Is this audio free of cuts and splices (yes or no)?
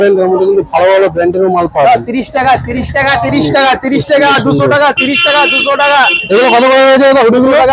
yes